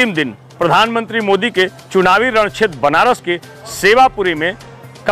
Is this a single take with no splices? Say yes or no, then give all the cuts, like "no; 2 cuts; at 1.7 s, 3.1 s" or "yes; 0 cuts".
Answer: yes; 0 cuts